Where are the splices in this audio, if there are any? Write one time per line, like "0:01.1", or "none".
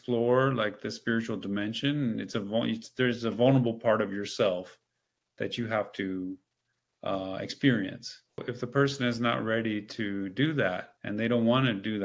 0:08.4
0:10.9